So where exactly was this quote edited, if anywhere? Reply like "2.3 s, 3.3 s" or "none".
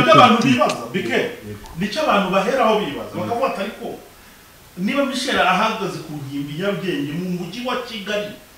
none